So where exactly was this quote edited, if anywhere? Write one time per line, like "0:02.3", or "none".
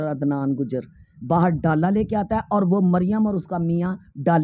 none

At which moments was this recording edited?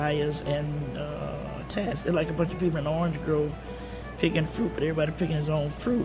none

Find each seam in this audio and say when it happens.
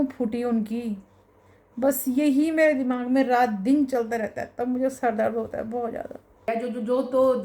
0:06.4

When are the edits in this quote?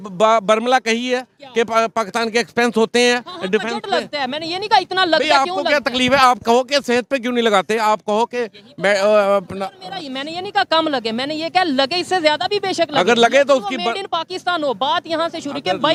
none

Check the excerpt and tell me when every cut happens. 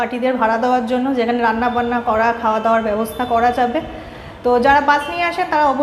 none

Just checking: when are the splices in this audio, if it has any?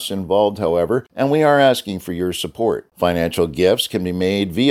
0:01.1

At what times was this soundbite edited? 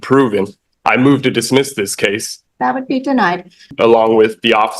0:02.3
0:03.7

